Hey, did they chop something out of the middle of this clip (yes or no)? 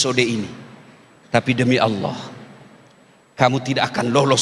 no